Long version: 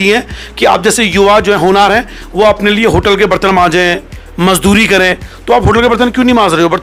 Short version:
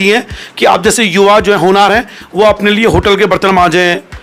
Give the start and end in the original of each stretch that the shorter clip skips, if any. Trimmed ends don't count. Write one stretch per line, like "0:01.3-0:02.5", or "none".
none